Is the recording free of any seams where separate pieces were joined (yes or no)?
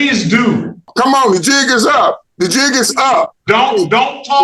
no